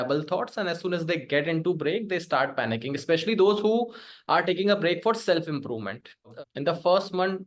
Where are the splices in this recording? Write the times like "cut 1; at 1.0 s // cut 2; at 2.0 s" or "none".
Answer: cut 1; at 6.4 s